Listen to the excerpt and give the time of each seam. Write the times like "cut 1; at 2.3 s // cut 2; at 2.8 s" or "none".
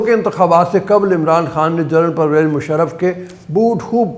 none